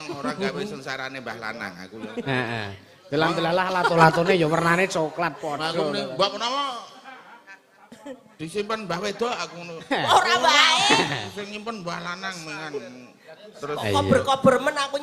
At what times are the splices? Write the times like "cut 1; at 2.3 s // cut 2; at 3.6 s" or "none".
none